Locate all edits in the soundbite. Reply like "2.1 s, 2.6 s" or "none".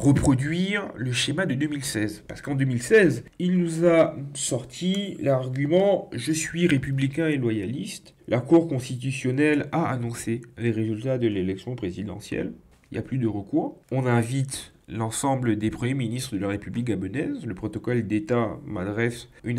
none